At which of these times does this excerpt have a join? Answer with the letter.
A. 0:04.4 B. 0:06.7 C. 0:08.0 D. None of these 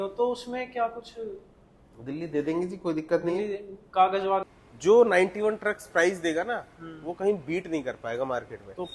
A